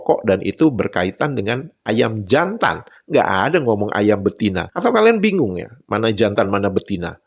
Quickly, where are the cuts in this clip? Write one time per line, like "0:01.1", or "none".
none